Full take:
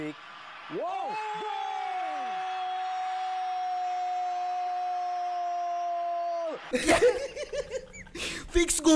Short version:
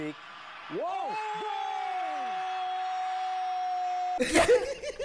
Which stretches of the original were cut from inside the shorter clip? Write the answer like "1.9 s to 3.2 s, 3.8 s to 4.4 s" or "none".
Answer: 4.1 s to 6.7 s